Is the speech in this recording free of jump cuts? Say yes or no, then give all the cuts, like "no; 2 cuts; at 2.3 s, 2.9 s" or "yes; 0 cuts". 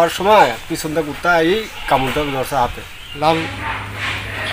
no; 1 cut; at 3.0 s